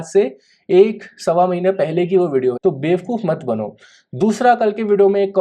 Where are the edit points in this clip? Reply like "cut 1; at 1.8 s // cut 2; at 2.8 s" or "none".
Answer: cut 1; at 2.6 s